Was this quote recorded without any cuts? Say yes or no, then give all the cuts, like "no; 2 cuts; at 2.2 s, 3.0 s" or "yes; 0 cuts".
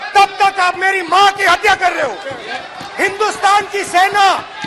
no; 1 cut; at 2.5 s